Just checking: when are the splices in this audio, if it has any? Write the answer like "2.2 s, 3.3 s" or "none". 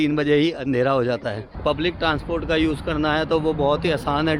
1.4 s